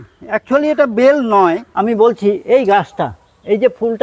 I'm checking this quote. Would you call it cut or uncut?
cut